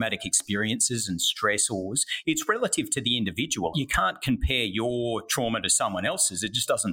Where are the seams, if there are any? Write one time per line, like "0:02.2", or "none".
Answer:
0:03.7